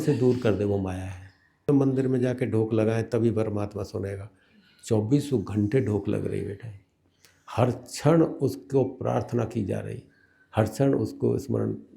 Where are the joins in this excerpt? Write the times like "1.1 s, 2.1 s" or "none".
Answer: 1.7 s